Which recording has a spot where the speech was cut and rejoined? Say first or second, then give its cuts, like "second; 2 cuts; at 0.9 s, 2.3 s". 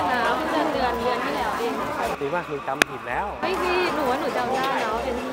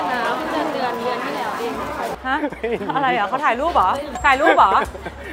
second; 2 cuts; at 2.2 s, 4.1 s